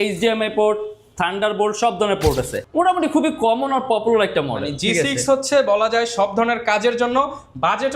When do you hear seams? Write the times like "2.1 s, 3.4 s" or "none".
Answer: 2.6 s